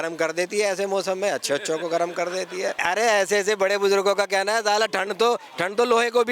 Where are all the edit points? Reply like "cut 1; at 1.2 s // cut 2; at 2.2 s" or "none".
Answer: cut 1; at 2.8 s